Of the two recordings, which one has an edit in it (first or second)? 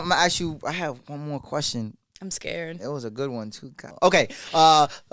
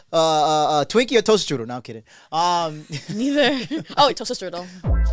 first